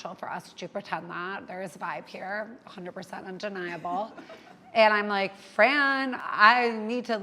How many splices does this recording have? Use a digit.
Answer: 1